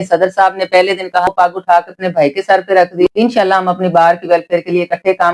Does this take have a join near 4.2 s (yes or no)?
no